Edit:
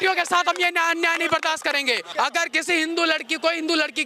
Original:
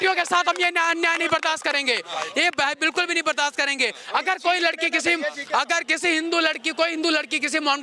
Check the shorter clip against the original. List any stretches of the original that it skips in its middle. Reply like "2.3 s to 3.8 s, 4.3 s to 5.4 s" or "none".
2.1 s to 5.4 s